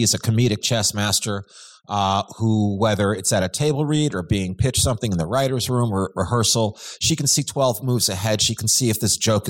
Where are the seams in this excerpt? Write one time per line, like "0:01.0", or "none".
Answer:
none